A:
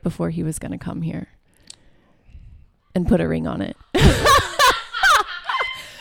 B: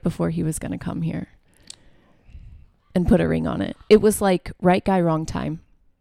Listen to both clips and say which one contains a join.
B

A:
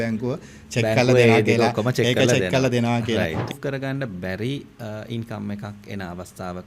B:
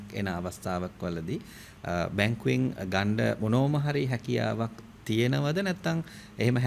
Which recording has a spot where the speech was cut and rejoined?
A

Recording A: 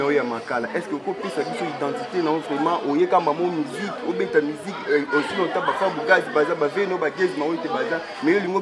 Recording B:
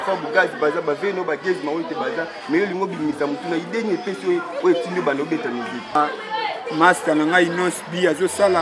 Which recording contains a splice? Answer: B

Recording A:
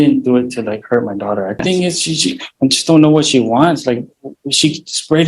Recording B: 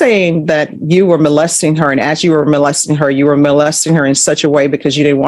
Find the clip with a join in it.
A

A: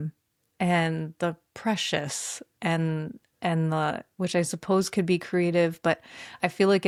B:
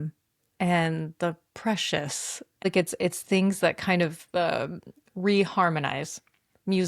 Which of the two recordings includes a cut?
B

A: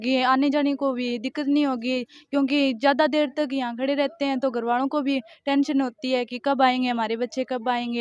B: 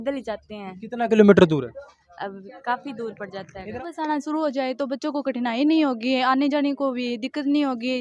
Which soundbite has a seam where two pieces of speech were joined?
B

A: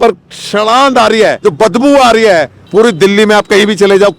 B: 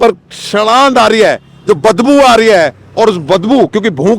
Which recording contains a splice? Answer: A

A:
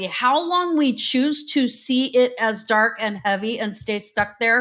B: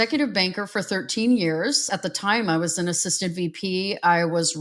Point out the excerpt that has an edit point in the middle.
B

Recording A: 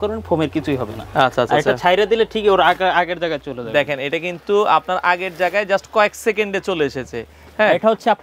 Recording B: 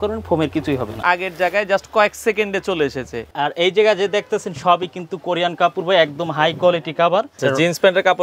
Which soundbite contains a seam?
B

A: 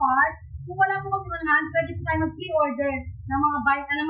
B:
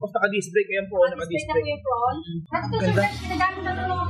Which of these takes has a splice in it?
B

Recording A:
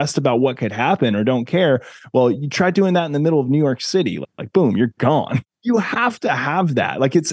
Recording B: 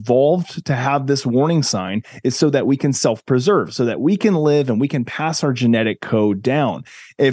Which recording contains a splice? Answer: A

